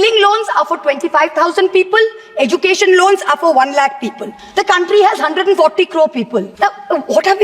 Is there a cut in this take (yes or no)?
yes